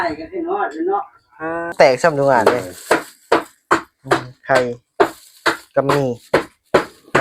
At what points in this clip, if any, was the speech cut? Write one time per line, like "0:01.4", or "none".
0:01.7